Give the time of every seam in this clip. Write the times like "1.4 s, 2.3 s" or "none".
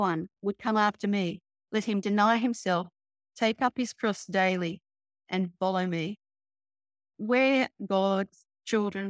7.1 s

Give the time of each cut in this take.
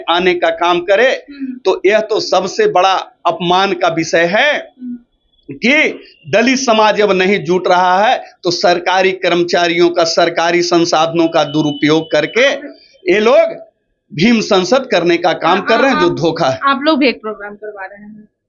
none

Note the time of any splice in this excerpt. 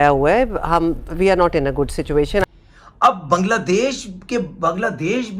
2.4 s

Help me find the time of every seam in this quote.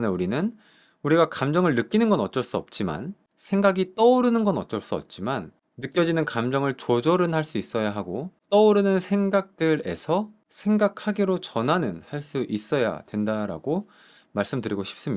none

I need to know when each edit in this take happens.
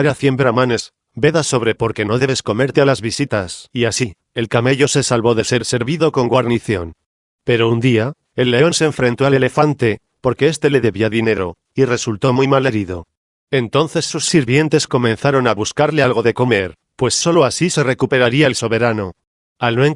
none

